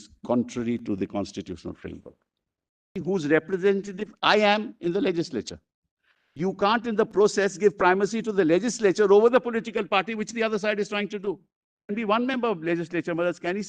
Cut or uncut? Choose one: cut